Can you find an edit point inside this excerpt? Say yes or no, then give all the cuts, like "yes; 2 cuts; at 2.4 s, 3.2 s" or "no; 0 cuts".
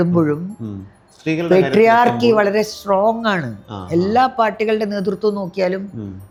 no; 0 cuts